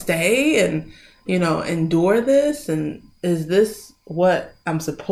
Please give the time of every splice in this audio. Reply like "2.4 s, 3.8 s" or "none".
none

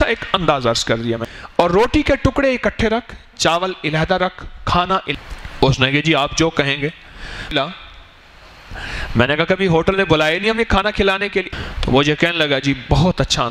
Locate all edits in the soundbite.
1.3 s, 5.1 s, 7.5 s, 11.5 s

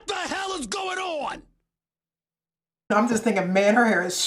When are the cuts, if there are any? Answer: 2.9 s

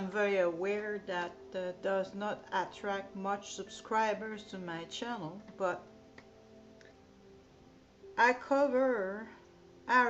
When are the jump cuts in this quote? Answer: none

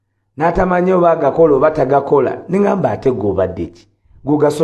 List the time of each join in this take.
none

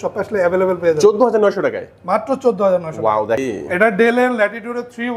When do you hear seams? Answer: 3.4 s

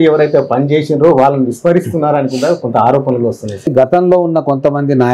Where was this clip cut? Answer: 3.7 s

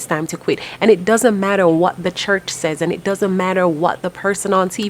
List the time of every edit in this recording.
none

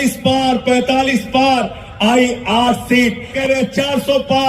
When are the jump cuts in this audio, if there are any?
3.3 s

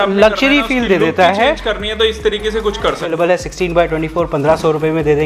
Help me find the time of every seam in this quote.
3.1 s

